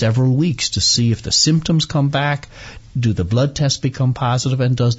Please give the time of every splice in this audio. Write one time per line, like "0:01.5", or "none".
none